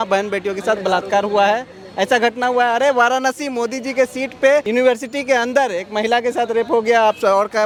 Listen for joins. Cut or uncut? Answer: uncut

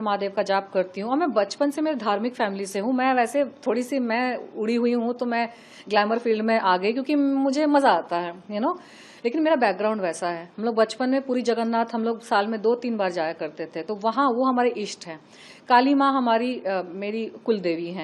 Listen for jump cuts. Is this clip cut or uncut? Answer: uncut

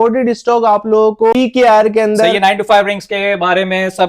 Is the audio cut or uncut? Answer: cut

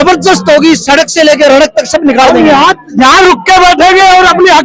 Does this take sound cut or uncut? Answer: uncut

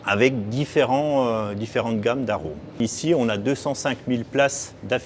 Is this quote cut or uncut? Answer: cut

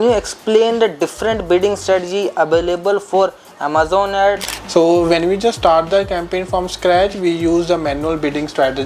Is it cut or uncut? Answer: cut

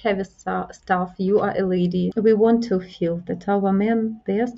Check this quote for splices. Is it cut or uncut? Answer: cut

